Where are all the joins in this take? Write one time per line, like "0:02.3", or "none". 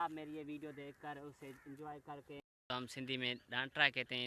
0:02.7